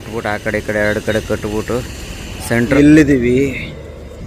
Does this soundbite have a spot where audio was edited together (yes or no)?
yes